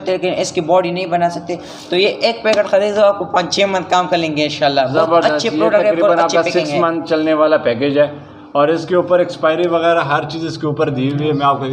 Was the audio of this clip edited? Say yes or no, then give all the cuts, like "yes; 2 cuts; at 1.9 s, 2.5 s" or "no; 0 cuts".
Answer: no; 0 cuts